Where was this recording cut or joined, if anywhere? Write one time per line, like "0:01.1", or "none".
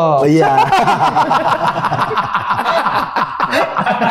none